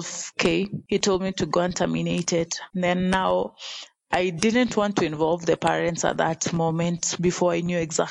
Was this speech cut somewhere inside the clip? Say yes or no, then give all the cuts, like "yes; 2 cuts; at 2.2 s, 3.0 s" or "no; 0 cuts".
no; 0 cuts